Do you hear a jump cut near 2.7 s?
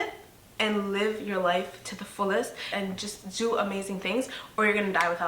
yes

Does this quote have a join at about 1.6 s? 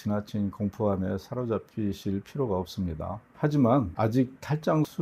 no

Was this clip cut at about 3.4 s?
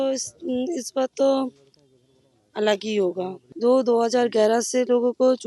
yes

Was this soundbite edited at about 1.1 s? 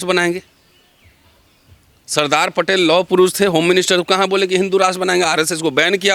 no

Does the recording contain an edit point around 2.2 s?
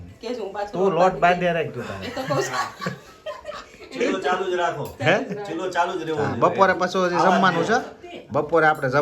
yes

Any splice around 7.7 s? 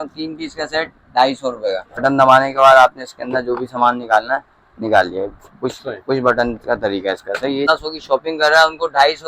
yes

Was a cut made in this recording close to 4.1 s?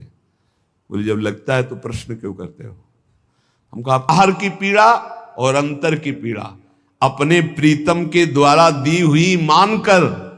yes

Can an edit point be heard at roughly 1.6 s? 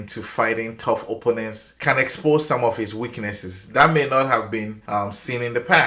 yes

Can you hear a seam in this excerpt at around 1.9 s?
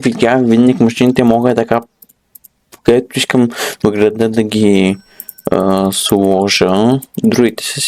no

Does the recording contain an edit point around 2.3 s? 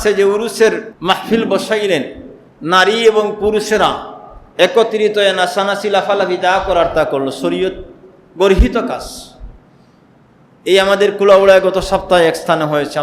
no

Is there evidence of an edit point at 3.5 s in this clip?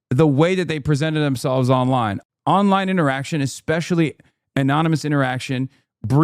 no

